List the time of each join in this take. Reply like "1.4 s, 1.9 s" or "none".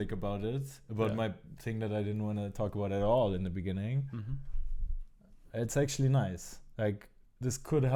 none